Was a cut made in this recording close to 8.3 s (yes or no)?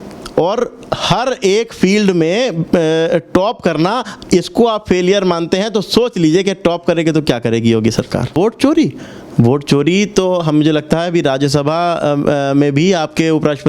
yes